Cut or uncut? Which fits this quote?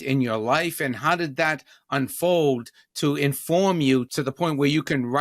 cut